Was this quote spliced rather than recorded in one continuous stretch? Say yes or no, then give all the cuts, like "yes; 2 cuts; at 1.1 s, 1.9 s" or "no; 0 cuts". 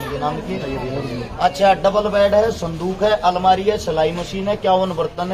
no; 0 cuts